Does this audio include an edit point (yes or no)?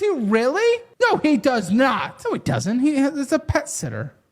yes